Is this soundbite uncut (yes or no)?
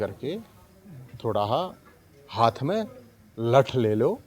yes